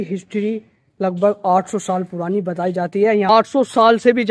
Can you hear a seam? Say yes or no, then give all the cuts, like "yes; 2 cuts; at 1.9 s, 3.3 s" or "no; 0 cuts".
yes; 1 cut; at 3.3 s